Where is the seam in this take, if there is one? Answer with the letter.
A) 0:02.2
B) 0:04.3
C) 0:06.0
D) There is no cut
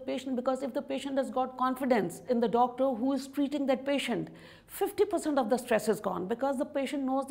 A